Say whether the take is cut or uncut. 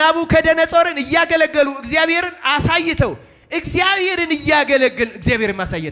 uncut